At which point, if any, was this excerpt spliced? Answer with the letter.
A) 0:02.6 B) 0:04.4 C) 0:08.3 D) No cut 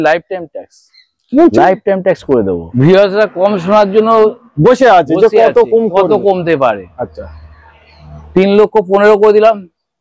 A